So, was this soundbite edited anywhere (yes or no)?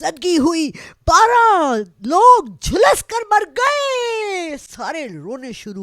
no